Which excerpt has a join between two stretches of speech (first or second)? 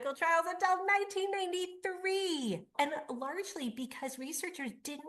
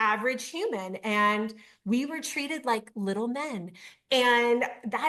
first